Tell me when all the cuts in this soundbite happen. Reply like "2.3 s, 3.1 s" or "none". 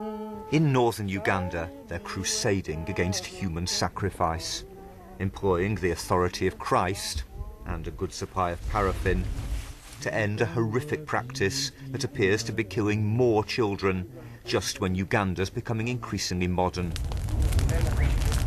none